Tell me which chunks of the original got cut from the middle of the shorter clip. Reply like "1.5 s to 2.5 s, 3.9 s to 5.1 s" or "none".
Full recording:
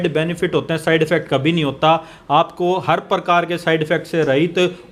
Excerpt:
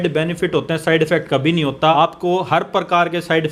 2.0 s to 2.3 s